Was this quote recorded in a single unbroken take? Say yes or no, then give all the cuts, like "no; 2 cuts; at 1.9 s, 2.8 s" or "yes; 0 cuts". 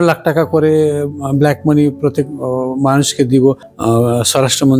no; 1 cut; at 3.7 s